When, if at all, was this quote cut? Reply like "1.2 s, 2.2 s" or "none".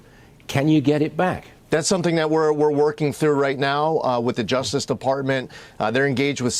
1.5 s